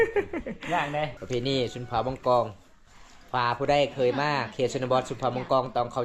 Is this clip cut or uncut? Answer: cut